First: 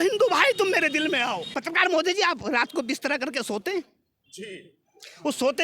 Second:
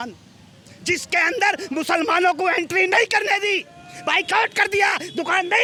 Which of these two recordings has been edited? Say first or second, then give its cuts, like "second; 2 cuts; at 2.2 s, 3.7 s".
first; 1 cut; at 1.5 s